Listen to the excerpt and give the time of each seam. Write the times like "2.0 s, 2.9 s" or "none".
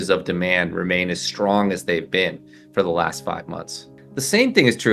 3.8 s